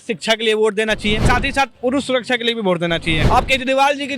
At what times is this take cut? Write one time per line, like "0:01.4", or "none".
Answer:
0:01.2
0:03.2